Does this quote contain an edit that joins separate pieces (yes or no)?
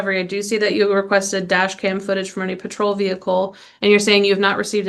no